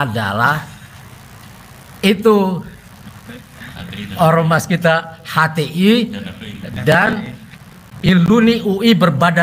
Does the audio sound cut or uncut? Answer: uncut